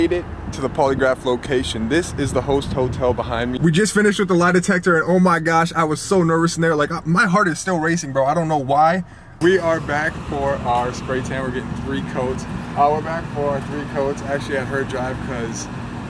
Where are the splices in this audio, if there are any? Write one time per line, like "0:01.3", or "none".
0:03.6
0:09.3
0:12.5